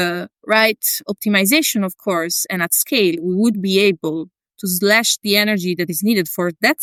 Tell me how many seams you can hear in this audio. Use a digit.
0